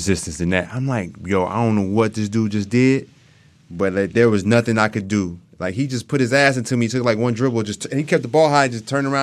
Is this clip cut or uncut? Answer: uncut